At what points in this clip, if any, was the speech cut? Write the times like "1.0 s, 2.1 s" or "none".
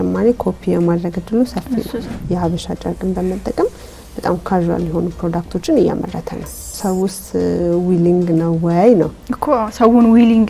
2.1 s, 6.7 s